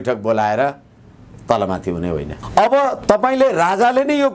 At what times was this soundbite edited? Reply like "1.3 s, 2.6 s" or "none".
2.3 s